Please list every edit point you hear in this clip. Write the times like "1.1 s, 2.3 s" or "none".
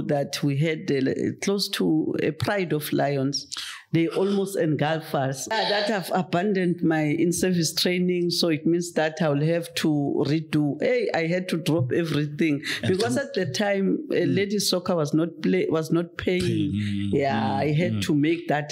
5.5 s